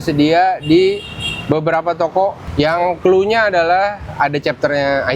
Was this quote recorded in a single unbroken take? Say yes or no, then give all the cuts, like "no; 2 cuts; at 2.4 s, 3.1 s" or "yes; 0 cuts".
no; 1 cut; at 2.4 s